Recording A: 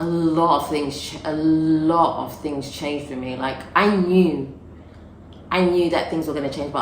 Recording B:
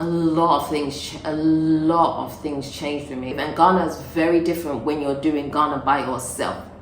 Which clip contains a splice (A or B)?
B